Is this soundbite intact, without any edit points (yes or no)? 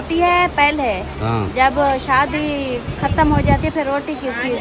yes